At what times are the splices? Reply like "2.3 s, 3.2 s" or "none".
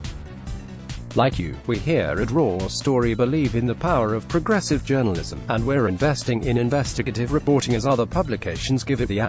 1.1 s